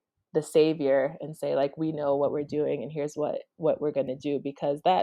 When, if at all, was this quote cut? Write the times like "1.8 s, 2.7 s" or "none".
none